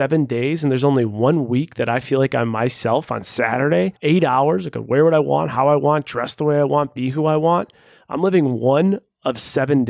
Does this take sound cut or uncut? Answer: cut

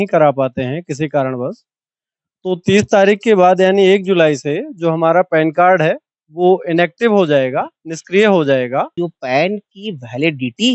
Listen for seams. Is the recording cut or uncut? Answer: cut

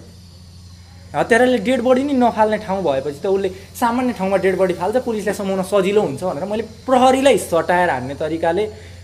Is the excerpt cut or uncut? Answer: uncut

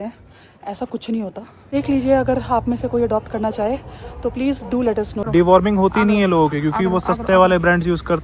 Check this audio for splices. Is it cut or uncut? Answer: cut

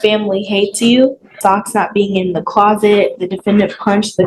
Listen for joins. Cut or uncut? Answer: cut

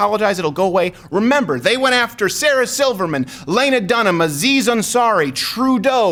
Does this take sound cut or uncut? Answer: uncut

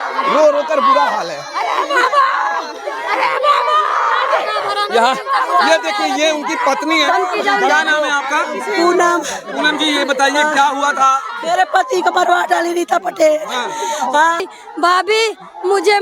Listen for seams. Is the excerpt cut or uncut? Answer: cut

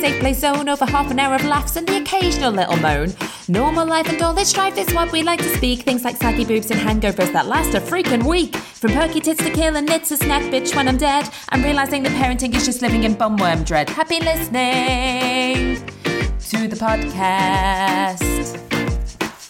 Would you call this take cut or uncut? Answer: uncut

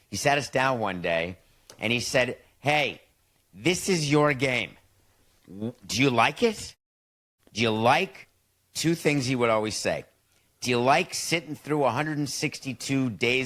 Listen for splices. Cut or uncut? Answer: uncut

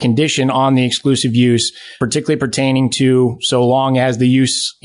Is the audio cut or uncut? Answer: uncut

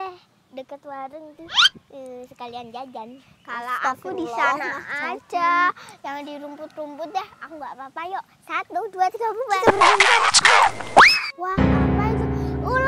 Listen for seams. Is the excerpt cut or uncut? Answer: cut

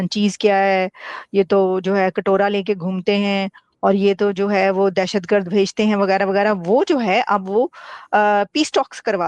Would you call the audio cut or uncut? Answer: uncut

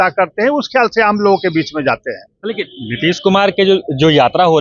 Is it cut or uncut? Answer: uncut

